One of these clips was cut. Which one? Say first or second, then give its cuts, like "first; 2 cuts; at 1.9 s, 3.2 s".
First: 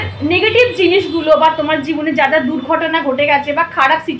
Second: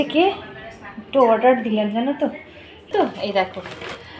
second; 1 cut; at 2.9 s